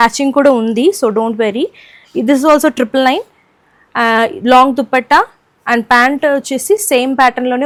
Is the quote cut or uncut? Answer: uncut